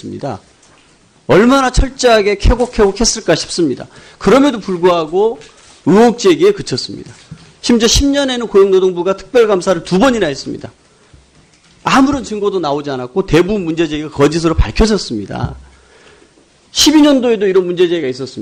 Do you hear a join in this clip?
no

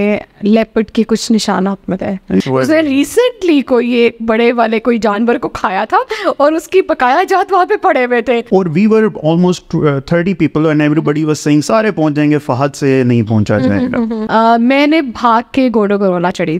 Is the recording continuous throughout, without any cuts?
no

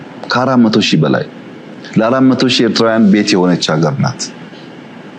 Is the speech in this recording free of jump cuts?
yes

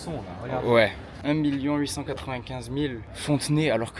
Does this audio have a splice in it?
yes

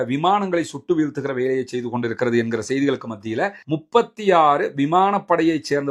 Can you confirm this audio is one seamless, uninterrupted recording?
no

